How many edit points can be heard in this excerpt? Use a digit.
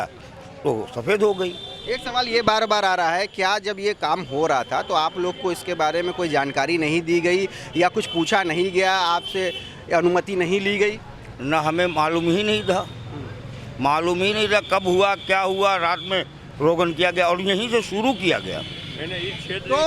0